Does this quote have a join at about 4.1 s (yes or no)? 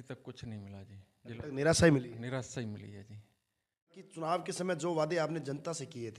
yes